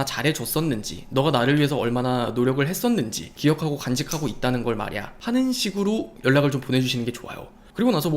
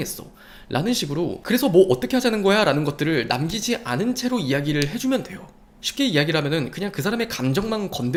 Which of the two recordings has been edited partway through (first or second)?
first